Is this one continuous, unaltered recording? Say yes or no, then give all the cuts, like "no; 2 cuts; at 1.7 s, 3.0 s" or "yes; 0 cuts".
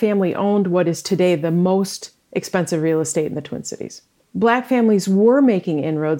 no; 2 cuts; at 1.0 s, 4.2 s